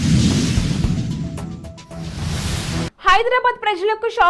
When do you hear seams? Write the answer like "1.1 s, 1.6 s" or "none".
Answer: none